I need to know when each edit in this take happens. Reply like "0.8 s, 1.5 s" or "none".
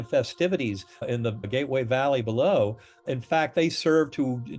1.1 s, 3.1 s